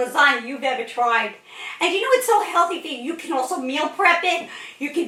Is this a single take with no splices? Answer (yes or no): yes